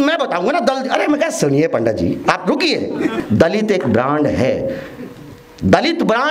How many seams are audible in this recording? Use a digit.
1